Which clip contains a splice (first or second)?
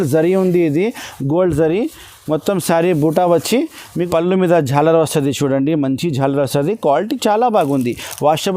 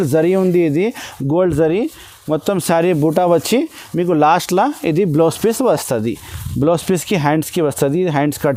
first